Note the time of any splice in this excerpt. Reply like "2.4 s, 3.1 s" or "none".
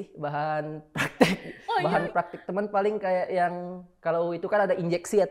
1.8 s